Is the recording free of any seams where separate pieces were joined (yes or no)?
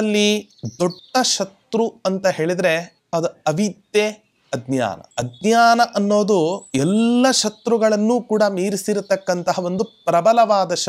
no